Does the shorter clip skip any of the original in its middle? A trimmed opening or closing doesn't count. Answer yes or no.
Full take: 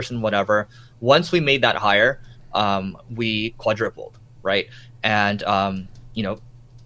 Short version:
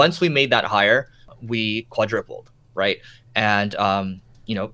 yes